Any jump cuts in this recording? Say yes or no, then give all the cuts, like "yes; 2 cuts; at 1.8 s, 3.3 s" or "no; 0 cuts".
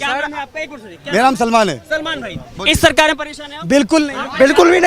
no; 0 cuts